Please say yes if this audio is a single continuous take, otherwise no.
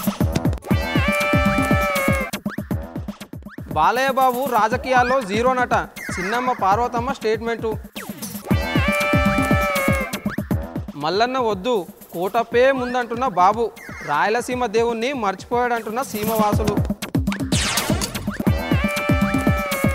yes